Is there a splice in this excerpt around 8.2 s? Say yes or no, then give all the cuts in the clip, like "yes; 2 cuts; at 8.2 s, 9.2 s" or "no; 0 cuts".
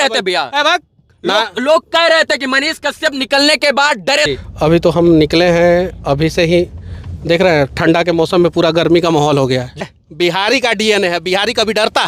no; 2 cuts; at 4.3 s, 9.8 s